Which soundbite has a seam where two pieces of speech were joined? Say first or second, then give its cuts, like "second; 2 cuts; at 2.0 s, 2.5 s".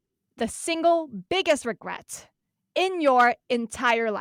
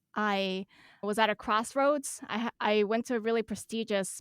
second; 1 cut; at 1.0 s